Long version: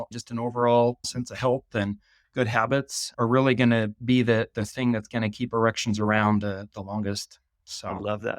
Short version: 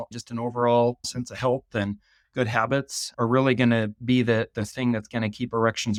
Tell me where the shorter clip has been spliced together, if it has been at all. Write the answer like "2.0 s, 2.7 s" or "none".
none